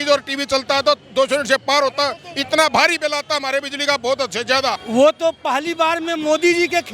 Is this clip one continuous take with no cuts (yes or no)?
no